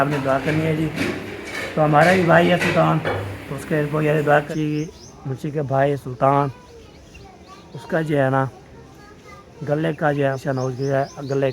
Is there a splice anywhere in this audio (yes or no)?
yes